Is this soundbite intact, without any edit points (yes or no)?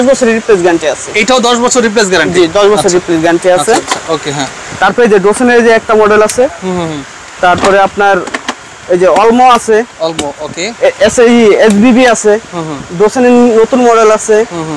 yes